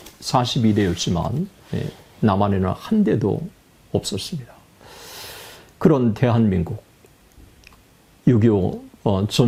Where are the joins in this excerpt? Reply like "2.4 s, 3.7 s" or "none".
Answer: none